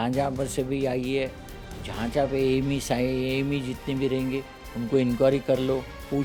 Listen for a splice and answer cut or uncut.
uncut